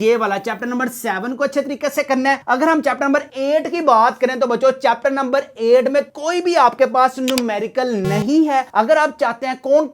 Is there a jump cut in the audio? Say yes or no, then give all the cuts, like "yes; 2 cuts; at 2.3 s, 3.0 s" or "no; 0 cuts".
no; 0 cuts